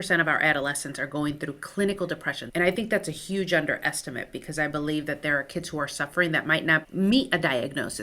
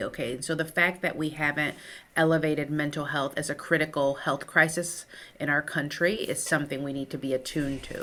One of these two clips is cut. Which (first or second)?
first